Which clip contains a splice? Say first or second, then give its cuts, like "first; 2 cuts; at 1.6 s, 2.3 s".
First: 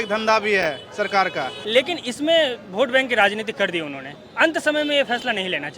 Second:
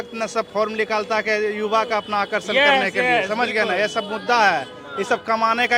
first; 1 cut; at 1.5 s